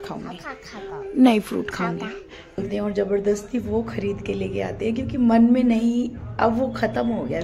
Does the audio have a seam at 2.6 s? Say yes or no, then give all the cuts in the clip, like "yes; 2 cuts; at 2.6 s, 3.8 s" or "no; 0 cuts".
yes; 1 cut; at 2.6 s